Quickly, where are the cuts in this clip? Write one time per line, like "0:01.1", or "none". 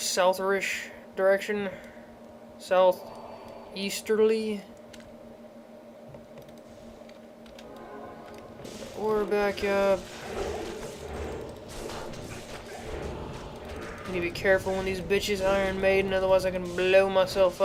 none